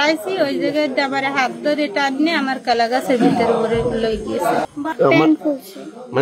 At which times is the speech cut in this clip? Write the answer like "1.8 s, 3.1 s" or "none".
4.7 s